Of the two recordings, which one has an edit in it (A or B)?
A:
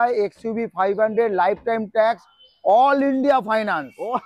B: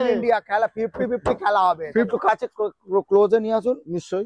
B